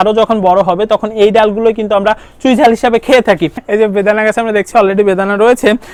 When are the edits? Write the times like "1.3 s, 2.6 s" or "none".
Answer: none